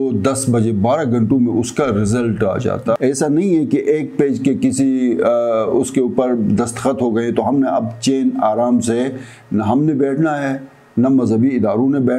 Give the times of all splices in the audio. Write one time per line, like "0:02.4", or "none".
0:03.0